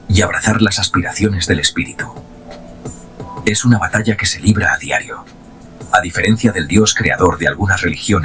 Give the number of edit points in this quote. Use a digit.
1